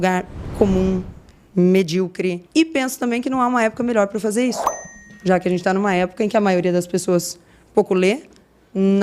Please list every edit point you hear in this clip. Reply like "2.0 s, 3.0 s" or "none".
2.4 s